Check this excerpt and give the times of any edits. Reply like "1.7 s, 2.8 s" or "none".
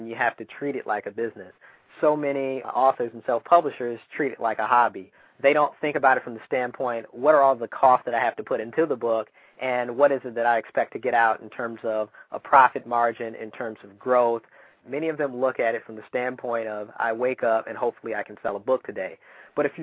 5.1 s, 14.7 s